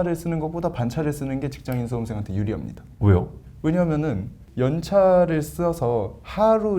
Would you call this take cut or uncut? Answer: cut